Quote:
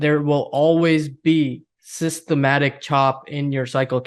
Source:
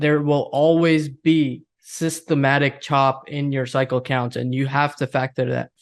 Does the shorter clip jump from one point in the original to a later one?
no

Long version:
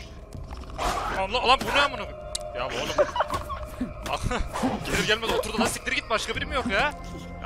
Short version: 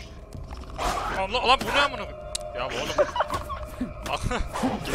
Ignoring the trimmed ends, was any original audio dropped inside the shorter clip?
no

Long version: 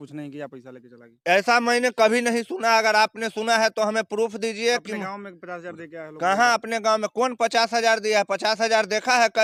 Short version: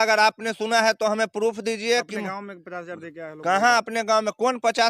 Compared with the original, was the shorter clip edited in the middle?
no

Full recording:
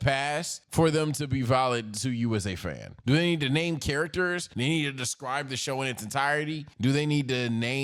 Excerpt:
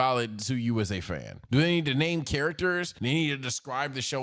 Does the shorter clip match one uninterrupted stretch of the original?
yes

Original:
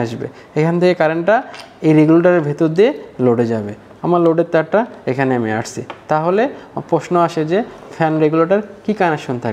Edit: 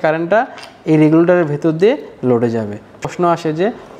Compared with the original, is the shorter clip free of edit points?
no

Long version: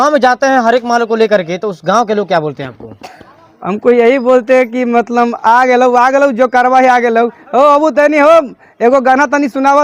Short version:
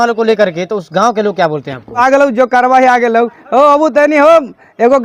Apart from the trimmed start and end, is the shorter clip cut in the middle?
yes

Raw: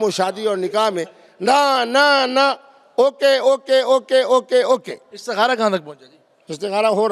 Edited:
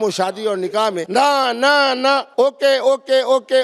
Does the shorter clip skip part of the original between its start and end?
yes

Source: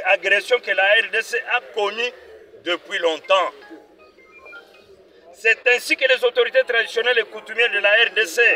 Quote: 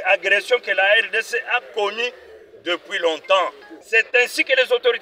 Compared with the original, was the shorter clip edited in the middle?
yes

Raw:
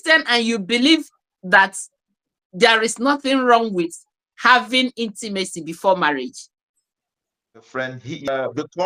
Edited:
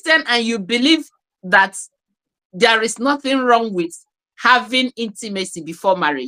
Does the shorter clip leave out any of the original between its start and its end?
no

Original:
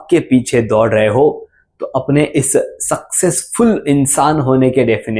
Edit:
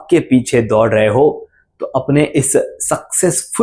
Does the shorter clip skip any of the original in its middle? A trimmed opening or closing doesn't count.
no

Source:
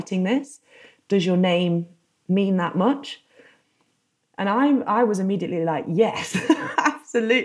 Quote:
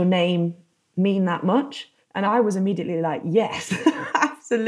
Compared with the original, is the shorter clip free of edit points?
no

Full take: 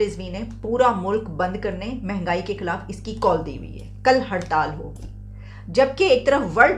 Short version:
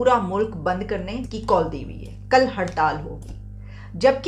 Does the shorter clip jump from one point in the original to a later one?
yes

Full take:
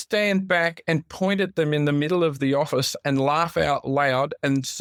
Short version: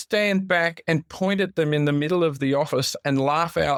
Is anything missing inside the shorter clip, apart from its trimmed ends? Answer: no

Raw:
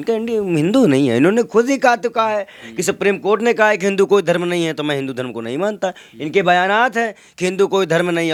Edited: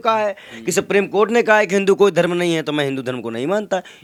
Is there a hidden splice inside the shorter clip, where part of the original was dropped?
no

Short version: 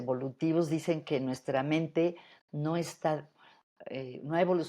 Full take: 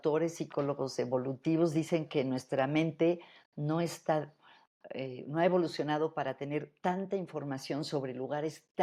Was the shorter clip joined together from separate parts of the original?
no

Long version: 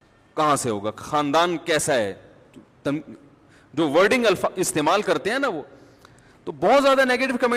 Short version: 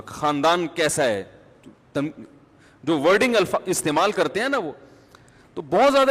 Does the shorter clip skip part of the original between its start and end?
no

